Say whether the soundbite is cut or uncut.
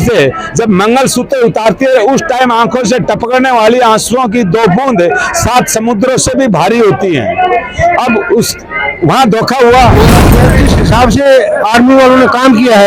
cut